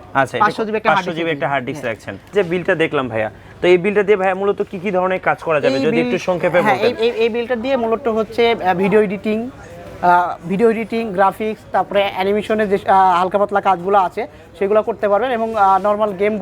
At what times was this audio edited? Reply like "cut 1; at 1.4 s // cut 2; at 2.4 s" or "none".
cut 1; at 2.3 s